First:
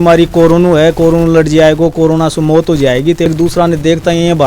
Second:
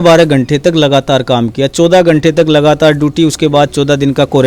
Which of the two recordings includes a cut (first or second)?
first